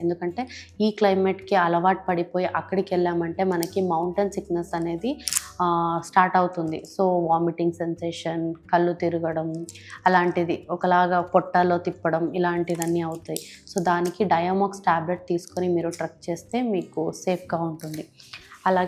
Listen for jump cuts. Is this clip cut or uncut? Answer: uncut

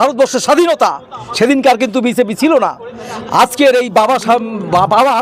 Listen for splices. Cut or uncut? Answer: uncut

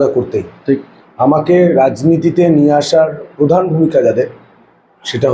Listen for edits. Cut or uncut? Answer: uncut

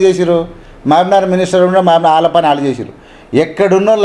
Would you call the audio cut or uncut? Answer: uncut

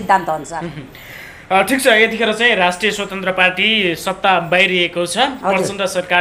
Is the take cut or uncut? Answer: uncut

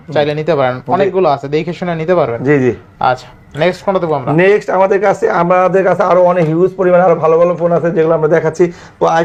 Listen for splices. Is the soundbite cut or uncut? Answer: uncut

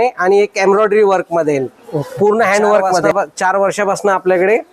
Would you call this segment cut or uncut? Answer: cut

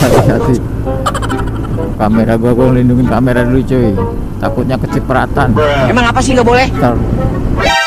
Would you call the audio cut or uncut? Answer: cut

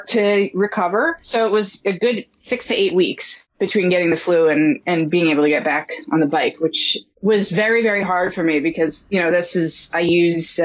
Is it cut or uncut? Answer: uncut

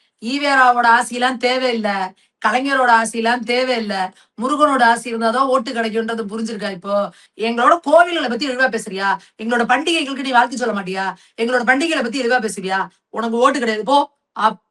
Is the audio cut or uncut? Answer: cut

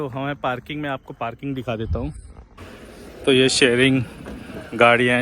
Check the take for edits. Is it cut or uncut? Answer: cut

